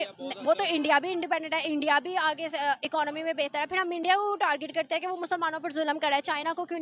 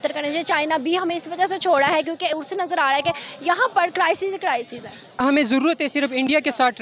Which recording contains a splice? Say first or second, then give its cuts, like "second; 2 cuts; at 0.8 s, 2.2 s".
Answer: second; 1 cut; at 5.2 s